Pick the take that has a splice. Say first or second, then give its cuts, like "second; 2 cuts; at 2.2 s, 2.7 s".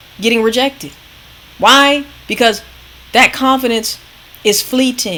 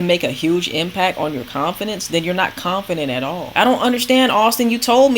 second; 1 cut; at 3.5 s